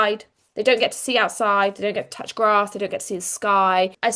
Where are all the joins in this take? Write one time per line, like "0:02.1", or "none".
none

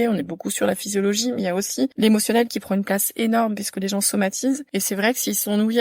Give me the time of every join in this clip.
0:04.7

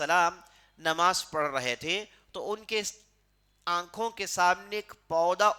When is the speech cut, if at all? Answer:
none

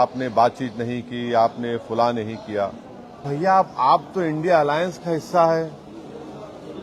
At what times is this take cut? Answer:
0:03.2

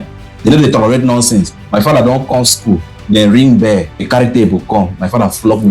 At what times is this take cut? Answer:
0:04.0

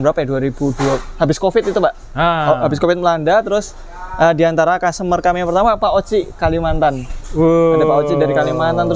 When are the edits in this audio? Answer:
none

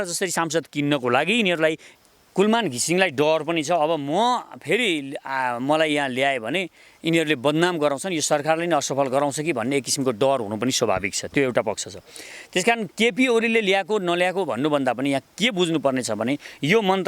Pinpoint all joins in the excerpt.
0:01.9

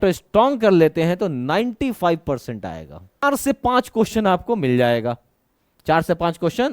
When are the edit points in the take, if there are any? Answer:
0:03.2

